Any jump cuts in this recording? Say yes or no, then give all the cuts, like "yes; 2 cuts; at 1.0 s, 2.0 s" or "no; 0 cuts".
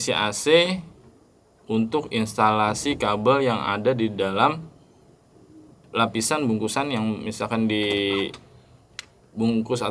no; 0 cuts